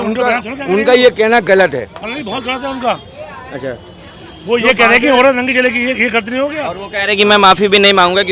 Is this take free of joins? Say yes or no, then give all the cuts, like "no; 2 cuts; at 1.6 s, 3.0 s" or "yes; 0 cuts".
yes; 0 cuts